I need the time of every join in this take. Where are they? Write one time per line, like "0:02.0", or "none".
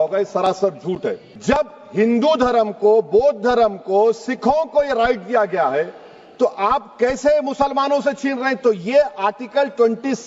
0:01.3